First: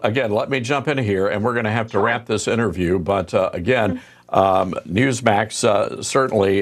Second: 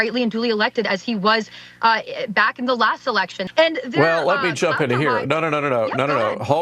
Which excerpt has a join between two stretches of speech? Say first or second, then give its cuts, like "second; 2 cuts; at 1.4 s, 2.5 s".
second; 1 cut; at 3.4 s